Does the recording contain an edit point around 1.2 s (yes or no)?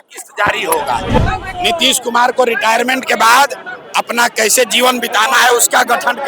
yes